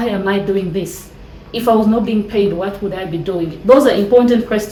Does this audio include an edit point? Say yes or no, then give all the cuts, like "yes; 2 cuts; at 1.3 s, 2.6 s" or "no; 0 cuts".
no; 0 cuts